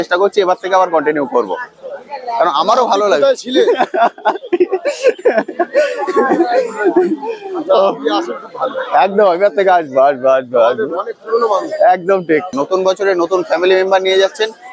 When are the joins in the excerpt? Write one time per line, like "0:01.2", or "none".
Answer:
0:12.5